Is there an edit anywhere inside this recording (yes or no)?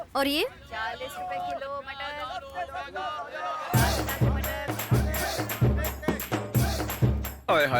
no